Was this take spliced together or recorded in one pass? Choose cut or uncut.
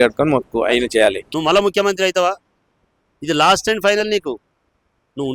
cut